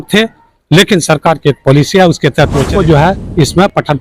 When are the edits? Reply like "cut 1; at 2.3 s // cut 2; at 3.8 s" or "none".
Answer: cut 1; at 2.7 s